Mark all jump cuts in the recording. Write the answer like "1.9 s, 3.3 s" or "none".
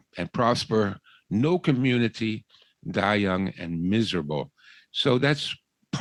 none